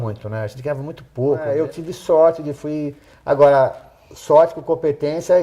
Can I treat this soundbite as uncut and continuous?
no; 1 cut; at 1.5 s

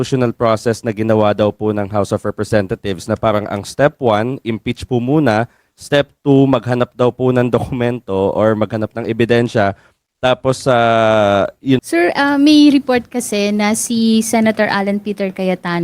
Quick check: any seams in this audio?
yes; 1 cut; at 11.8 s

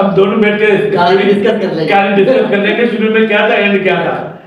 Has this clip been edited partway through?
no; 0 cuts

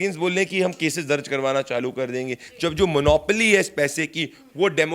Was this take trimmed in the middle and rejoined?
yes; 1 cut; at 2.5 s

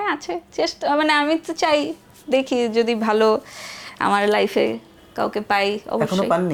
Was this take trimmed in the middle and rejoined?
no; 0 cuts

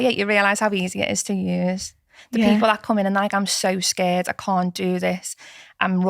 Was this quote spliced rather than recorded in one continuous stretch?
no; 0 cuts

